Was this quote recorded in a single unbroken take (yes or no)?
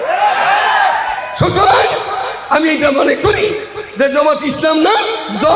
yes